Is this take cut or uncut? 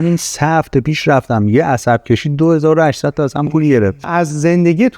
cut